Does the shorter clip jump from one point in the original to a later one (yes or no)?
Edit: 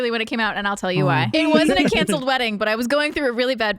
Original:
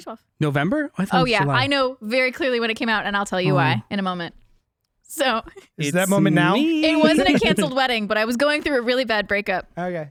yes